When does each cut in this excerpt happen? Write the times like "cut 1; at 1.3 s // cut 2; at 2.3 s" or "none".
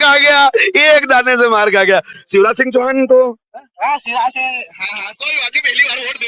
none